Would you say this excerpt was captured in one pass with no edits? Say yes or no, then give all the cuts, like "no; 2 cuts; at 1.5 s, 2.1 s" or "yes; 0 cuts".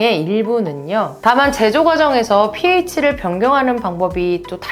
no; 1 cut; at 1.1 s